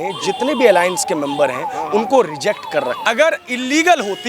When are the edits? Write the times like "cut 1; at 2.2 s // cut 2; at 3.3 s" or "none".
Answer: cut 1; at 3.0 s